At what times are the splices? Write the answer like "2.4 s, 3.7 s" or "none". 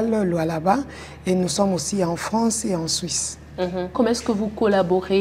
3.9 s